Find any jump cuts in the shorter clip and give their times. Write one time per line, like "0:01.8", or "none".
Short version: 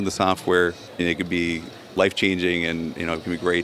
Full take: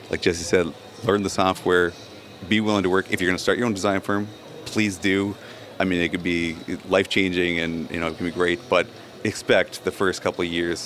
0:01.0